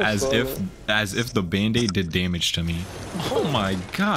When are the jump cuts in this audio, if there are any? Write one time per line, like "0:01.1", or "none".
0:02.9